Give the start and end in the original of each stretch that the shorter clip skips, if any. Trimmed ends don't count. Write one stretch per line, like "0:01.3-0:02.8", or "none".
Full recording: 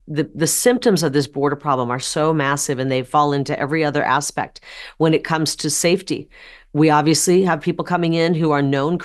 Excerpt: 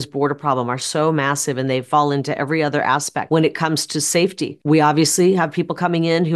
0:04.4-0:04.8
0:06.2-0:06.6